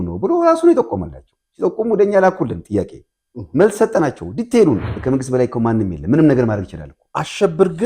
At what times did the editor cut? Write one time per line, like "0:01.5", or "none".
0:04.9